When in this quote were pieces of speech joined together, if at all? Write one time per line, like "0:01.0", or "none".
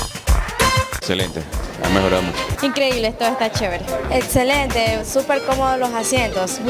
0:00.9

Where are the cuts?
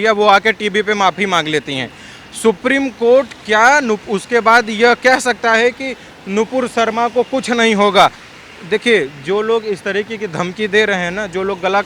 0:08.2

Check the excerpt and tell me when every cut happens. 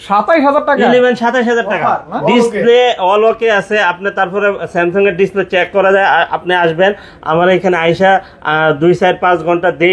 0:02.1

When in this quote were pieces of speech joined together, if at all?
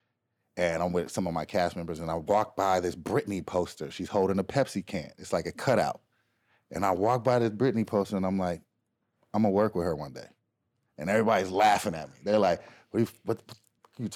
none

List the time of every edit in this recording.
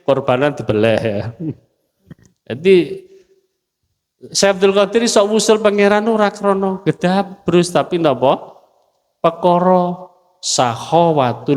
none

